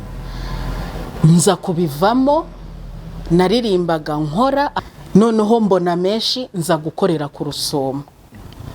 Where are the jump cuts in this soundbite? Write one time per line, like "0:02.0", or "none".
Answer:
0:04.7

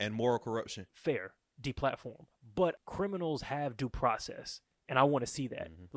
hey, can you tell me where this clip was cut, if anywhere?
0:00.9
0:02.8

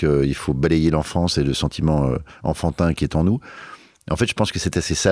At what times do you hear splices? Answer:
none

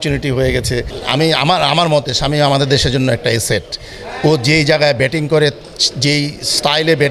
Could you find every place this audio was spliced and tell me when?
0:00.9

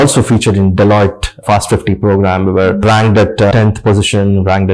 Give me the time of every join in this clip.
0:03.5

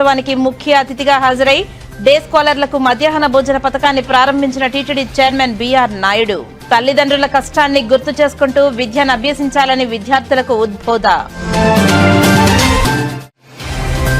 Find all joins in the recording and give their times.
none

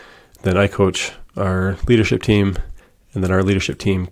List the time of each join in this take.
none

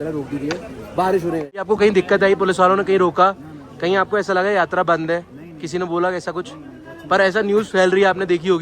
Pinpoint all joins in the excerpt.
0:01.6

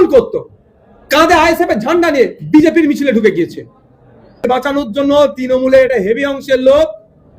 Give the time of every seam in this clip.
0:04.4

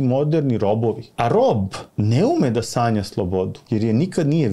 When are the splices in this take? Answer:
0:01.1
0:01.8
0:03.6

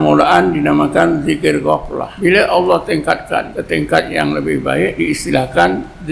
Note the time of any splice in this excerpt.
0:02.1
0:03.5
0:04.9

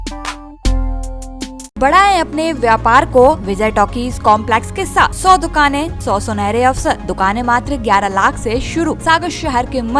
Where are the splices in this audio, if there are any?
0:01.8
0:03.5
0:05.2
0:05.9
0:07.1
0:09.0

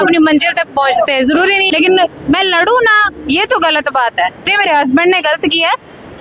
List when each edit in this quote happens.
0:01.6
0:04.5

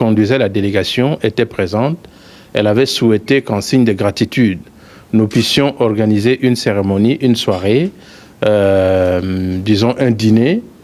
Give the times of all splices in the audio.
none

